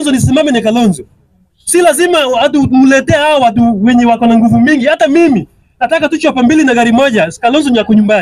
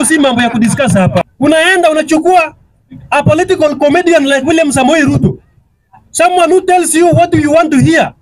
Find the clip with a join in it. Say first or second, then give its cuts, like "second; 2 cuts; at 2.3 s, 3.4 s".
second; 1 cut; at 1.3 s